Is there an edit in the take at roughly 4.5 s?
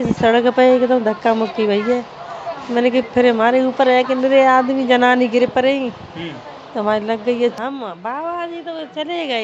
no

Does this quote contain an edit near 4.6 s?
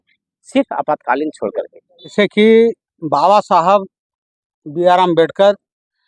no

